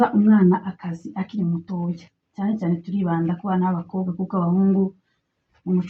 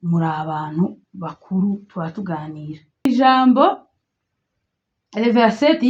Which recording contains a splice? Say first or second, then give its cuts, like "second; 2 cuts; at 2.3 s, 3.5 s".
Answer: second; 1 cut; at 3.1 s